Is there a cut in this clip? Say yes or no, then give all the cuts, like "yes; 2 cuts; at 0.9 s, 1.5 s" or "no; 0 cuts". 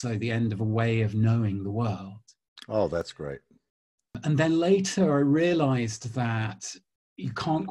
no; 0 cuts